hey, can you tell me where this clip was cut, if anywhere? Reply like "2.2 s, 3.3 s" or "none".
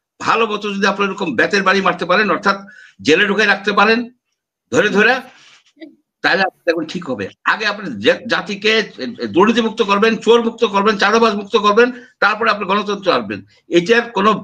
none

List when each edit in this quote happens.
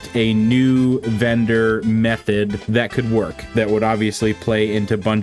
2.6 s

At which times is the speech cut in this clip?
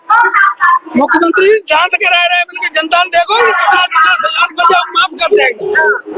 none

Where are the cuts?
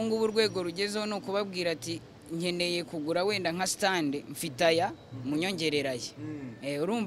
none

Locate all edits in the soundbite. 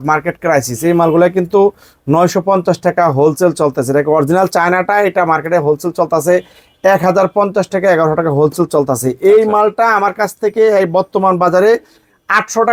none

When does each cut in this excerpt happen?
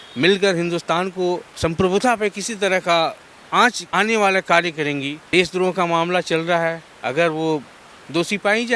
1.5 s, 3.8 s, 5.2 s

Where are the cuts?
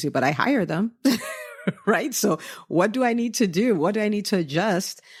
none

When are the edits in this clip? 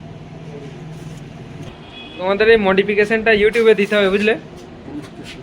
1.8 s

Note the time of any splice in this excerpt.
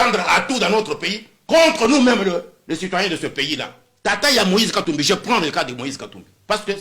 3.9 s

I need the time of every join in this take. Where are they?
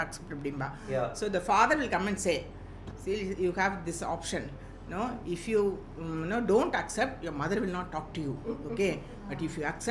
none

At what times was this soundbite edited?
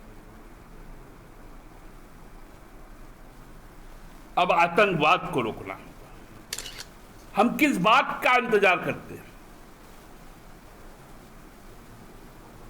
6.8 s

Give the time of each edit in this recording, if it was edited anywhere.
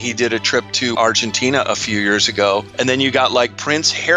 0.9 s, 2.7 s

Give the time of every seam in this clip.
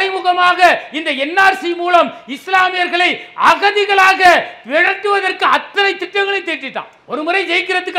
none

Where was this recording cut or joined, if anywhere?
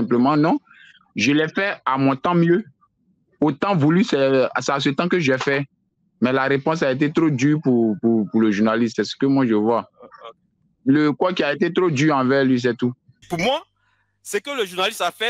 10.5 s, 13.2 s

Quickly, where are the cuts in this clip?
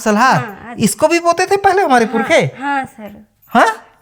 none

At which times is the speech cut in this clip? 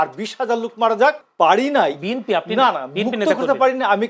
1.3 s

